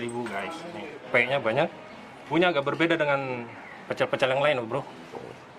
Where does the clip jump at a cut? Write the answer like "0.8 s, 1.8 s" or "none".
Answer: 1.0 s, 2.3 s